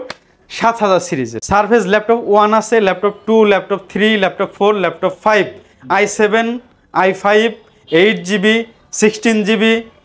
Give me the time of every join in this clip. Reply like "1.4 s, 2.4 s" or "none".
1.3 s